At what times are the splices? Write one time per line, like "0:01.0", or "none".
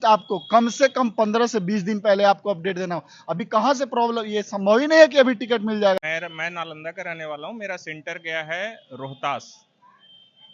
0:06.1